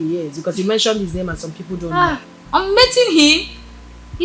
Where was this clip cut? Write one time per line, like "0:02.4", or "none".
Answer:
0:02.3